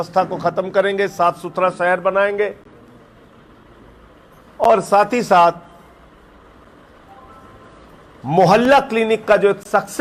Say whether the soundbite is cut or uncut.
uncut